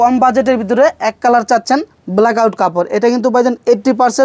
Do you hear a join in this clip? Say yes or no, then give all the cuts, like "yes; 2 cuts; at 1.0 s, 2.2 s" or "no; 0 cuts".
no; 0 cuts